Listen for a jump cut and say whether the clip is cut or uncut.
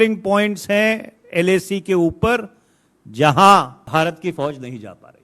cut